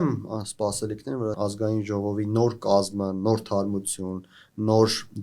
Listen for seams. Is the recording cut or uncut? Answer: cut